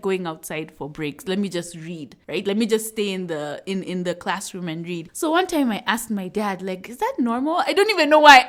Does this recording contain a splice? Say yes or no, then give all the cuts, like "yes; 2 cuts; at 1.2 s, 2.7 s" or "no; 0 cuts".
no; 0 cuts